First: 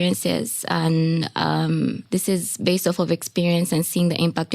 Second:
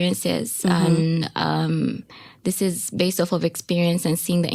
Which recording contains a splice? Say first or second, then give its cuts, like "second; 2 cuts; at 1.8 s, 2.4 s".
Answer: first; 1 cut; at 2.0 s